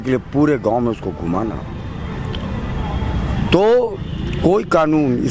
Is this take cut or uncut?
uncut